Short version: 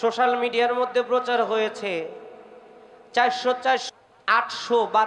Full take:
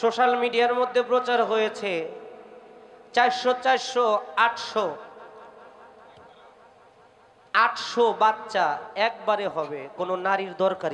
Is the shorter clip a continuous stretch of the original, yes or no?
no